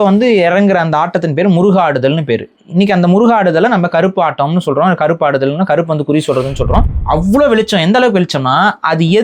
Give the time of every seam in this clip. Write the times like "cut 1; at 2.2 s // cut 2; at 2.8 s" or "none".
cut 1; at 6.9 s